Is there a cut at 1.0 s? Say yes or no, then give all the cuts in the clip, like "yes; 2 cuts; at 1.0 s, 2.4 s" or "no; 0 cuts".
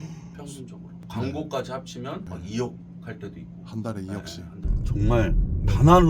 yes; 2 cuts; at 1.0 s, 4.6 s